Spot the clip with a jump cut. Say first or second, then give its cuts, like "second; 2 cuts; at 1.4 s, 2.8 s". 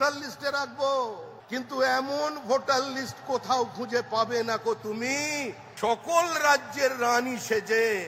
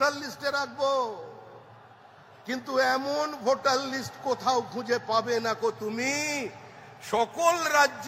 first; 2 cuts; at 1.3 s, 5.6 s